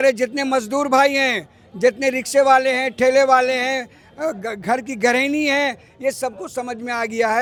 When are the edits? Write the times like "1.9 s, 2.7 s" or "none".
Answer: none